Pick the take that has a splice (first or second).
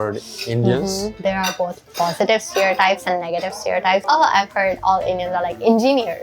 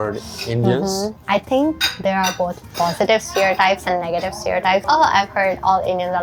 first